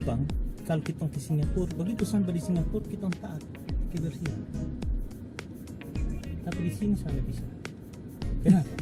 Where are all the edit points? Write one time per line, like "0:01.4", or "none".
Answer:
none